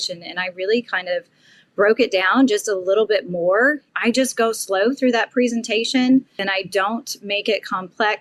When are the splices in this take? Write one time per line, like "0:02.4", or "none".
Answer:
0:03.9
0:06.4